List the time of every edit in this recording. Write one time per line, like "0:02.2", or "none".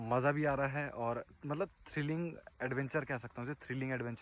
none